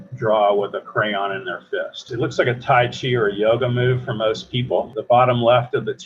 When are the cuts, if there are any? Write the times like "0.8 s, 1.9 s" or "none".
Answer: 2.1 s, 4.9 s